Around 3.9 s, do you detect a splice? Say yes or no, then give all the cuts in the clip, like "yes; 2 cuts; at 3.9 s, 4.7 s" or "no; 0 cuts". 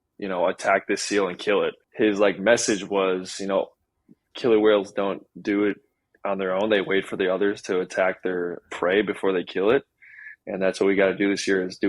no; 1 cut; at 1.8 s